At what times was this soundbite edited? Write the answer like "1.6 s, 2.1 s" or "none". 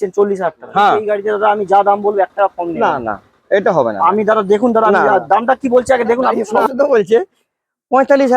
1.0 s, 6.7 s